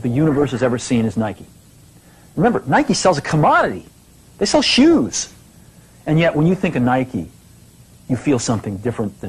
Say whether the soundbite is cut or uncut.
uncut